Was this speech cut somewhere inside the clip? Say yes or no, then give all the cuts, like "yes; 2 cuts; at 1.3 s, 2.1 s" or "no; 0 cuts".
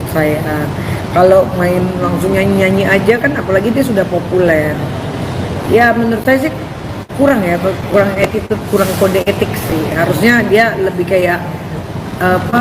no; 0 cuts